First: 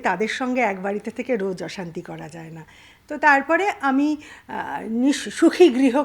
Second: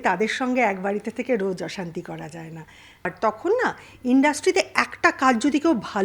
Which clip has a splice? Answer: second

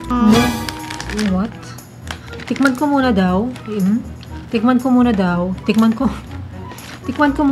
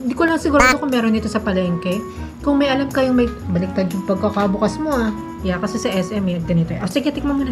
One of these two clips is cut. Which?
second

